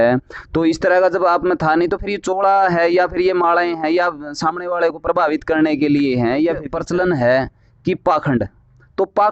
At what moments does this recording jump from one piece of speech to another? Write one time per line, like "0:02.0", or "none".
0:06.7